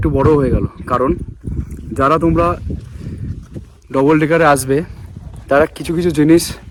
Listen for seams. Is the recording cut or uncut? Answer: uncut